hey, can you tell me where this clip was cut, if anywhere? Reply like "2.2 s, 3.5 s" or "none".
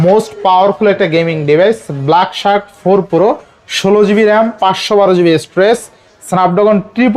none